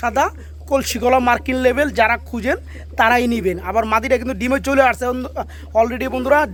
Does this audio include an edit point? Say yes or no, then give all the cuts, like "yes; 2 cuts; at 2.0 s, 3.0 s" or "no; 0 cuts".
no; 0 cuts